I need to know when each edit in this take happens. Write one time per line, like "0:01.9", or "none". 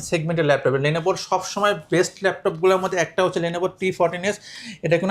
none